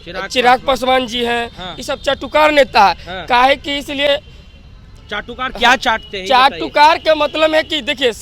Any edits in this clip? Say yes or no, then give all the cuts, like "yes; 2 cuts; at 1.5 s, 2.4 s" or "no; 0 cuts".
no; 0 cuts